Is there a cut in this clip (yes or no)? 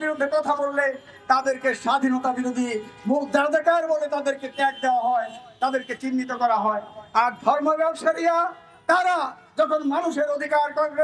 no